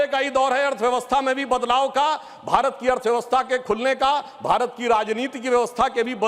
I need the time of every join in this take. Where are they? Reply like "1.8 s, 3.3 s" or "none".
none